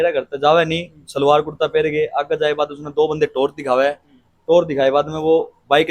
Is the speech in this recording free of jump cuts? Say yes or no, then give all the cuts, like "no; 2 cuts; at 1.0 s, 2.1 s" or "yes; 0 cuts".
yes; 0 cuts